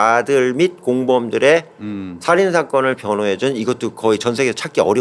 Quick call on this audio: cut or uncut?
uncut